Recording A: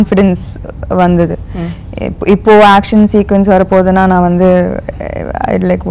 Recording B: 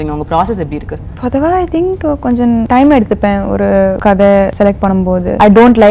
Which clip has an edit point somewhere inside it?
B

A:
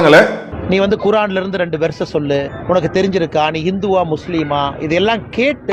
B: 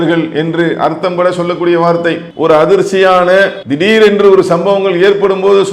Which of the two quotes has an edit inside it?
B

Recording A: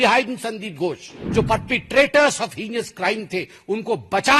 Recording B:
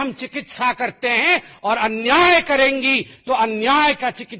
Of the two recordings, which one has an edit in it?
A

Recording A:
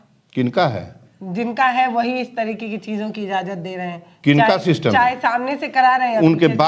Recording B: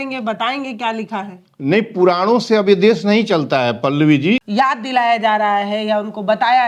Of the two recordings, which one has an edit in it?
B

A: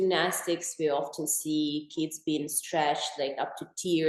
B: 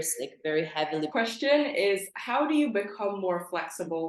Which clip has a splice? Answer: B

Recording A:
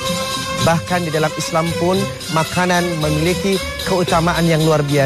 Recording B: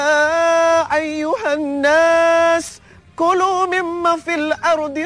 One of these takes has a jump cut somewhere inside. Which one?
B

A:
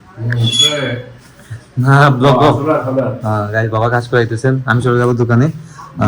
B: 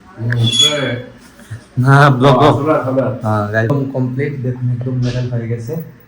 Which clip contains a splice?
B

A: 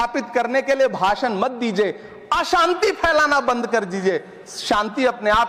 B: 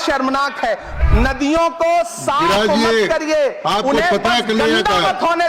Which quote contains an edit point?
B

